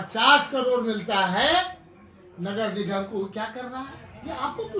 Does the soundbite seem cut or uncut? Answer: uncut